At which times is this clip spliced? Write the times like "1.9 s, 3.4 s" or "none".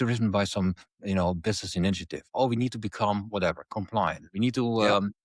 none